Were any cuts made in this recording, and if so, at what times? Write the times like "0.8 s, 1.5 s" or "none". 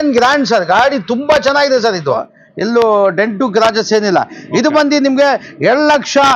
2.3 s